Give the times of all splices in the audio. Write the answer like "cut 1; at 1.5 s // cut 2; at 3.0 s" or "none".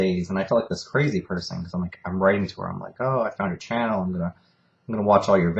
none